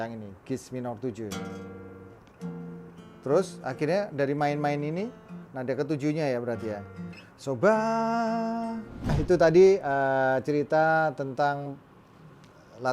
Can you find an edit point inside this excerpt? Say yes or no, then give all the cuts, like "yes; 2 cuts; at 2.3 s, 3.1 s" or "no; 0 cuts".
yes; 1 cut; at 9.1 s